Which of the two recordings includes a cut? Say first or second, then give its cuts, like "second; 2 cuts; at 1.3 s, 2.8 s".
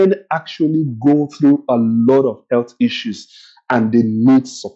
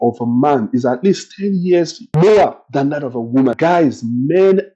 second; 2 cuts; at 2.0 s, 3.6 s